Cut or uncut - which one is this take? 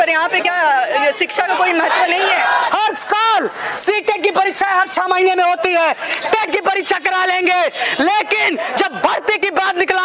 cut